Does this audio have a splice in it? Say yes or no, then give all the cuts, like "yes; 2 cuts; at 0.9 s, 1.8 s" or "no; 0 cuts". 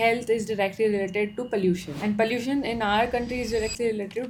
no; 0 cuts